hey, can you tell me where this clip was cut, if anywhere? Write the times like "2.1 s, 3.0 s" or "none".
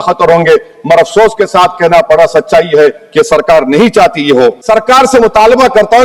4.6 s